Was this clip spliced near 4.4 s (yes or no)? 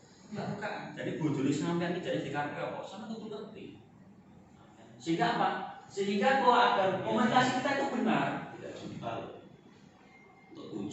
no